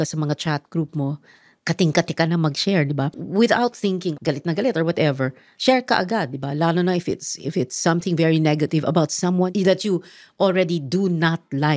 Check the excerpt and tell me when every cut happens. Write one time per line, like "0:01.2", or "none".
0:03.1
0:04.1
0:09.5

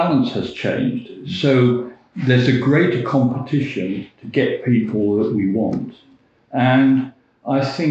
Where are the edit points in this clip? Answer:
none

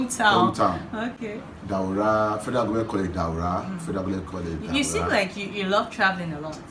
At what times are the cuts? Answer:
none

